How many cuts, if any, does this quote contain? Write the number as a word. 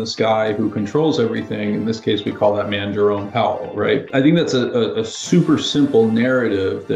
one